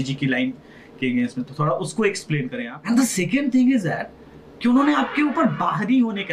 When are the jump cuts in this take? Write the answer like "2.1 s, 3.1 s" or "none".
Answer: 2.7 s